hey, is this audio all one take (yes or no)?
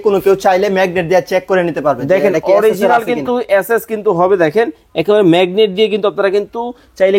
yes